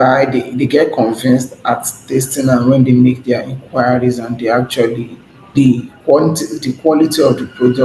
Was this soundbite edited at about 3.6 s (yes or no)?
no